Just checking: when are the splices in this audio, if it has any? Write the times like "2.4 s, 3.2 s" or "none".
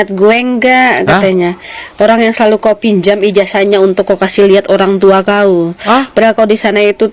none